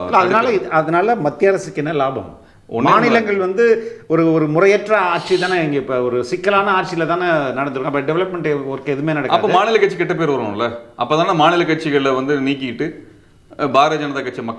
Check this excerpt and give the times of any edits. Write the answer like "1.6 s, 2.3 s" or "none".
none